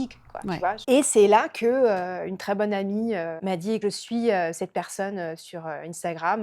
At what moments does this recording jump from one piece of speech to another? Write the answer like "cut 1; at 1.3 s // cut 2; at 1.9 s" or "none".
cut 1; at 0.8 s // cut 2; at 3.4 s